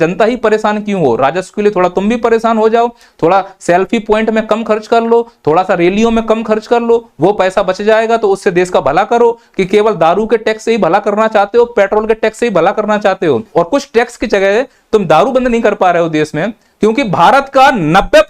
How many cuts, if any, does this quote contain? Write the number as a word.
one